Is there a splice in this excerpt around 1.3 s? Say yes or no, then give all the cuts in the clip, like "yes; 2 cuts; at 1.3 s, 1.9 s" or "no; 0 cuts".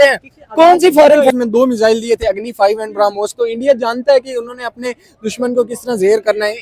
yes; 1 cut; at 1.3 s